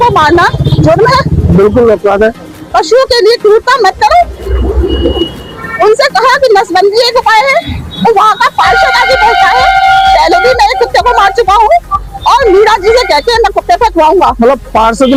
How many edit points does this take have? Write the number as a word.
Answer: zero